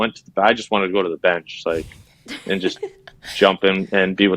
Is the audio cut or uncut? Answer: uncut